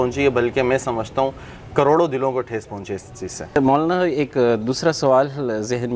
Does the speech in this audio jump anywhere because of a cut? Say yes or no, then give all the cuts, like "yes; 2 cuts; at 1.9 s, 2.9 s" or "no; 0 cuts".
no; 0 cuts